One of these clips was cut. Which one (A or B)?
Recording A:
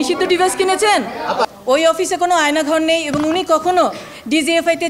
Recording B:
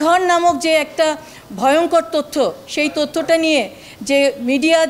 A